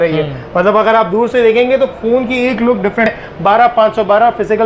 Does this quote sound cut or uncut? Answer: cut